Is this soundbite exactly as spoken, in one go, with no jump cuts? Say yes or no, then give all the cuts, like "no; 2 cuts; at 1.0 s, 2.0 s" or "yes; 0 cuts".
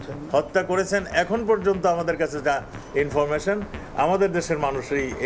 yes; 0 cuts